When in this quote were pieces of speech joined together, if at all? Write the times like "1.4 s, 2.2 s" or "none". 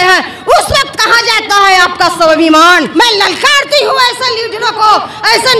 2.9 s